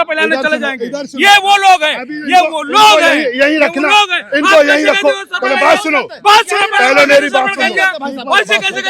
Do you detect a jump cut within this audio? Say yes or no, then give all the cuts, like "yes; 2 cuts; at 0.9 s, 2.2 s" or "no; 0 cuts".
no; 0 cuts